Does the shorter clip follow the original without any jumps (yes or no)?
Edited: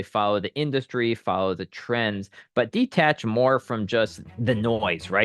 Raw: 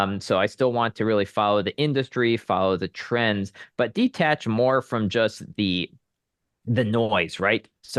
no